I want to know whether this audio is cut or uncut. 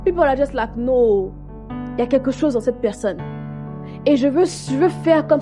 uncut